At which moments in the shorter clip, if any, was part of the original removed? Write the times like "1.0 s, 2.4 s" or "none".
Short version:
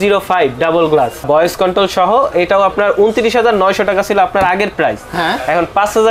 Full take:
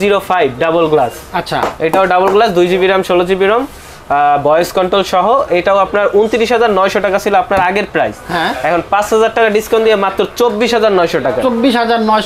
1.2 s